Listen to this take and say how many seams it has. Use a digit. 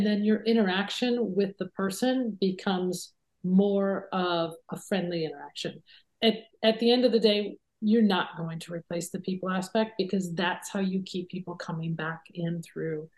1